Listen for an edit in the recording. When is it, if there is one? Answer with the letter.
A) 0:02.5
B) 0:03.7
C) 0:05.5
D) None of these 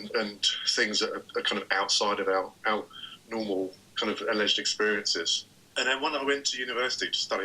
C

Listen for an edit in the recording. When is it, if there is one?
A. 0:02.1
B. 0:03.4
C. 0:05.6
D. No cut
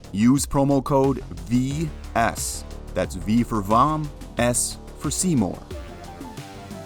C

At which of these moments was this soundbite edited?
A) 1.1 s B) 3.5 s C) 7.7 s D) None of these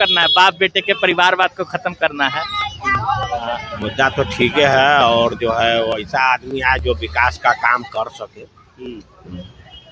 B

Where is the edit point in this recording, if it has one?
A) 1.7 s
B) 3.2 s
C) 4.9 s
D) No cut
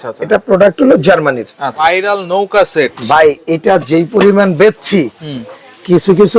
A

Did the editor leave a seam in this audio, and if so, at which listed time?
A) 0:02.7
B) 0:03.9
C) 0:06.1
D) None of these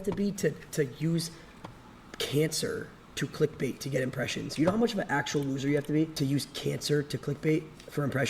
C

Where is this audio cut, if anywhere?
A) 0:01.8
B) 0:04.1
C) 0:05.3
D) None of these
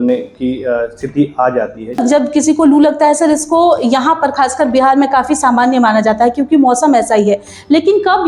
A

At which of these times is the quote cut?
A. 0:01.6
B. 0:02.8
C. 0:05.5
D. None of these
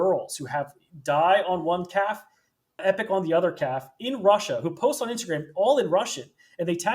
B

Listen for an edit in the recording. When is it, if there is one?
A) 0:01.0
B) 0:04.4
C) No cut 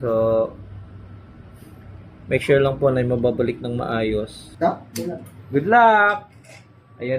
B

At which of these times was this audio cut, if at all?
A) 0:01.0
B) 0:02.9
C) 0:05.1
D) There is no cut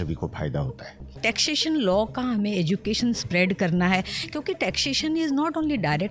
A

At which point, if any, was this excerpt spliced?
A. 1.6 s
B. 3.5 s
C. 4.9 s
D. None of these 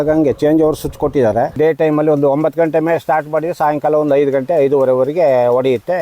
A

